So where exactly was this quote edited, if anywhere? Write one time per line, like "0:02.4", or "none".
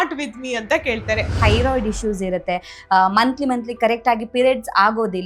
0:01.3